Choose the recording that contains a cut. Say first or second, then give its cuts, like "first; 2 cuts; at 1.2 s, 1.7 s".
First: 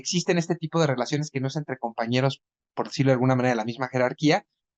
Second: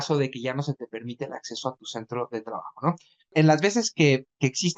second; 1 cut; at 3.3 s